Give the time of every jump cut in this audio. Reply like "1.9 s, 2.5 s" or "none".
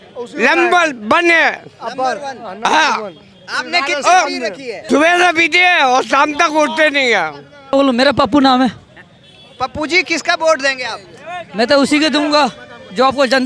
4.7 s, 7.7 s